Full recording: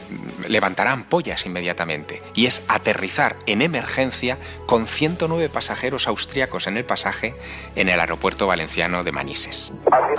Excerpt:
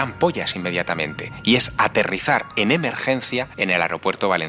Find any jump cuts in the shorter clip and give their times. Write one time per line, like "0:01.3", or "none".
0:03.5